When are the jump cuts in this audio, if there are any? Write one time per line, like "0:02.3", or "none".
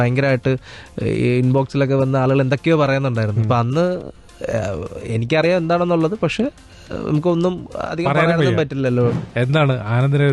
0:09.2